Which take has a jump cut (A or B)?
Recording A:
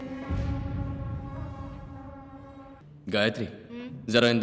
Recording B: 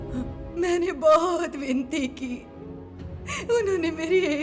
A